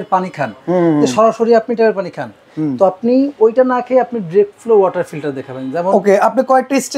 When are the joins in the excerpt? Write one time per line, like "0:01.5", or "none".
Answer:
none

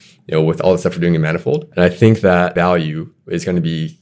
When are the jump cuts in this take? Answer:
0:01.7
0:02.5

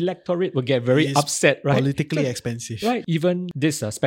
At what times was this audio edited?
0:03.0

